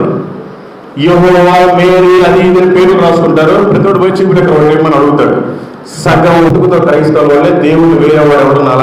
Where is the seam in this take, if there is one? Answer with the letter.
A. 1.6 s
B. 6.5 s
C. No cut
B